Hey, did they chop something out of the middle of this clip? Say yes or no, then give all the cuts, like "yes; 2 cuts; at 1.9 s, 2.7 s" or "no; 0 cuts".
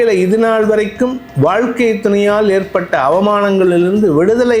no; 0 cuts